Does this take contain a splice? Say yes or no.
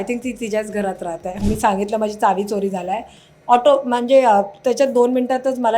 yes